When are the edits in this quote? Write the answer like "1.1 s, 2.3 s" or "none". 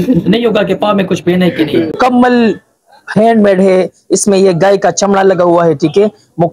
2.0 s